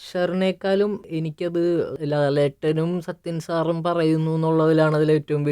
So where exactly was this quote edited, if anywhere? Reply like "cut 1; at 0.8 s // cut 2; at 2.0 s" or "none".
cut 1; at 1.0 s // cut 2; at 1.9 s